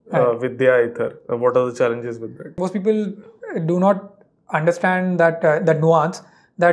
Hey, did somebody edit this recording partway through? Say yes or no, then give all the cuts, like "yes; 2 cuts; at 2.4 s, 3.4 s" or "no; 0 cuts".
yes; 1 cut; at 2.6 s